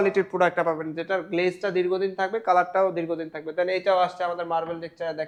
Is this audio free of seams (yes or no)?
yes